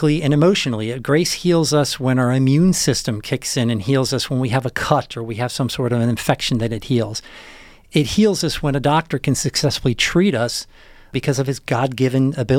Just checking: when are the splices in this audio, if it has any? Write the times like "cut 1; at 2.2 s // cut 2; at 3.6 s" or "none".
cut 1; at 11.1 s